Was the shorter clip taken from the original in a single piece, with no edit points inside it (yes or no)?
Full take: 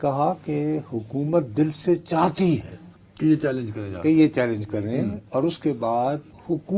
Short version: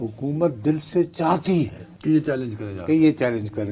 no